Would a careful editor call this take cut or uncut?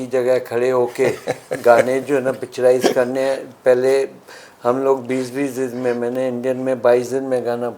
uncut